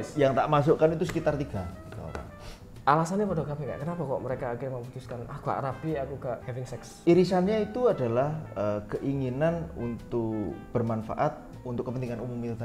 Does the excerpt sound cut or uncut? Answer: cut